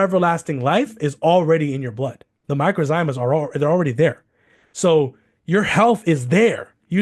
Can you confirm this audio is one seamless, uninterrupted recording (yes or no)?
no